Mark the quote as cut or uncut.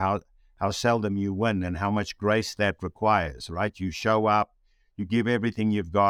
uncut